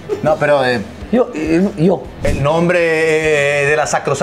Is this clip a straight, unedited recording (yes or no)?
no